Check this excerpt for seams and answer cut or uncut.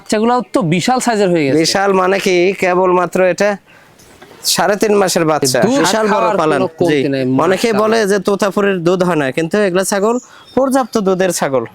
cut